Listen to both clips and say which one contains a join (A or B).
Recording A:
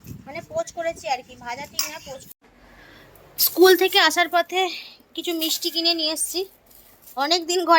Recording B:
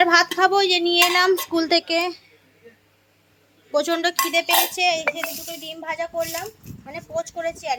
A